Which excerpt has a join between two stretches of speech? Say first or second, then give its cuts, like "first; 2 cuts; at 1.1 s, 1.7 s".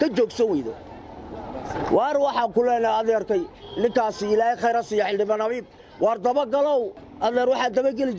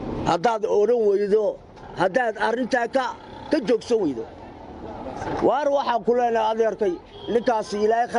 first; 1 cut; at 7.0 s